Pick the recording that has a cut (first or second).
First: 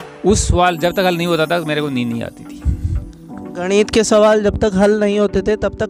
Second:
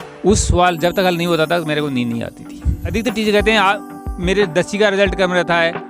second